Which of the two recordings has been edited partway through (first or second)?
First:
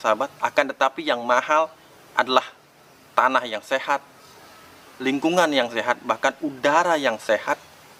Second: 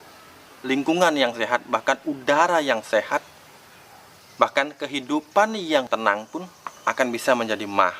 second